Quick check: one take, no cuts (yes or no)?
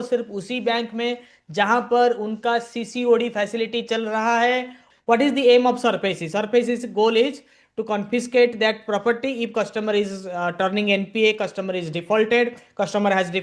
no